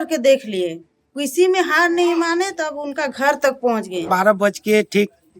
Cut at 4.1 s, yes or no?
yes